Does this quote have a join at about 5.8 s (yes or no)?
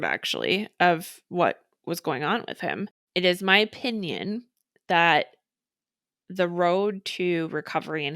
no